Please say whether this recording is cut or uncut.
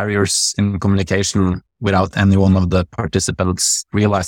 uncut